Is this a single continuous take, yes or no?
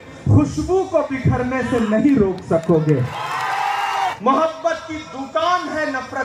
no